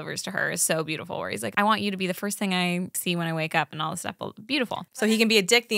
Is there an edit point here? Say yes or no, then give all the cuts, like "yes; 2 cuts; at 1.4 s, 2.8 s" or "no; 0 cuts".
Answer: yes; 3 cuts; at 1.5 s, 3.0 s, 5.1 s